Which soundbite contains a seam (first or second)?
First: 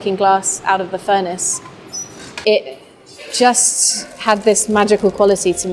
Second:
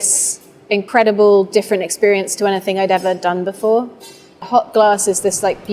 second